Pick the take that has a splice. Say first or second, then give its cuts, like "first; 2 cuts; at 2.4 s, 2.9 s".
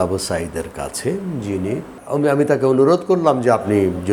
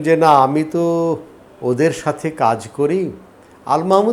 first; 1 cut; at 1.9 s